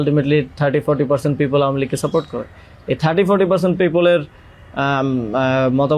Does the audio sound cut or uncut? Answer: uncut